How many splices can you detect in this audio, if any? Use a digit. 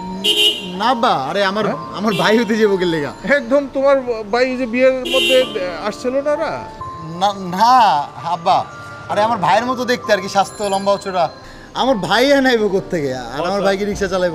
0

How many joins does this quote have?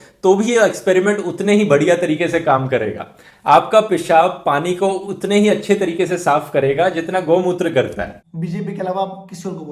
1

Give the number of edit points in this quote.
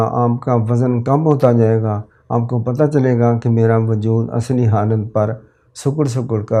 0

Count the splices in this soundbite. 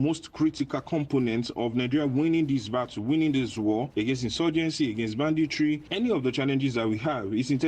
0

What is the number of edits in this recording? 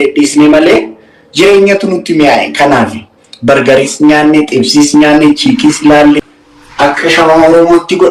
1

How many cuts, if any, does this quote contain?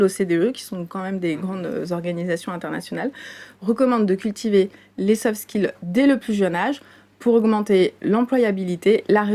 0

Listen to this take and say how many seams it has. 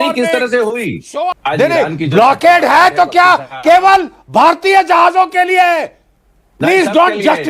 1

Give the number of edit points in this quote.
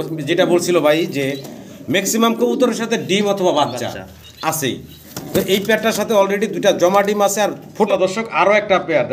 1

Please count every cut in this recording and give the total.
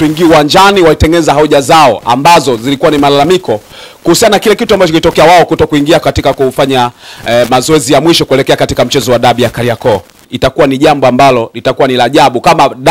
1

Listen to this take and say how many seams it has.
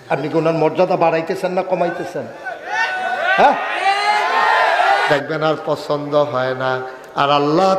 1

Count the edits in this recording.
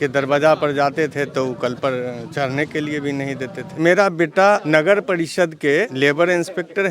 3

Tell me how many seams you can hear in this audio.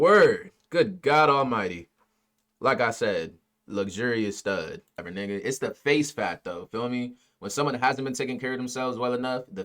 1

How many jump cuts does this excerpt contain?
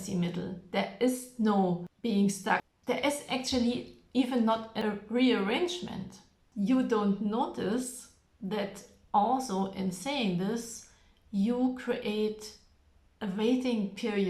4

